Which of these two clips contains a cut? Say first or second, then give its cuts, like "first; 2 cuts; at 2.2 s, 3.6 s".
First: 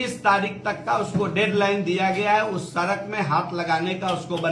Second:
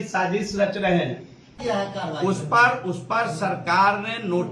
second; 1 cut; at 1.5 s